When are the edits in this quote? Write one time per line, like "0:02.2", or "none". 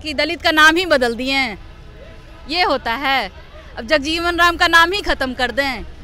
none